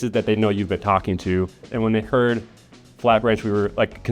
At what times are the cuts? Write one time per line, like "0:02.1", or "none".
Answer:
0:01.6